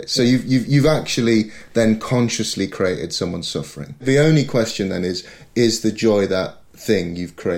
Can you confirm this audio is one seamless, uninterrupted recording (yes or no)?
no